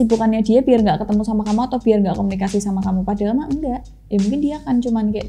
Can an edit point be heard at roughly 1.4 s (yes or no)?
no